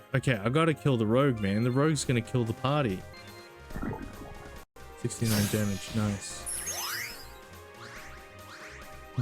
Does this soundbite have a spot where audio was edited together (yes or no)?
yes